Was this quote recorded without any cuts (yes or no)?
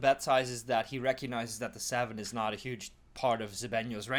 yes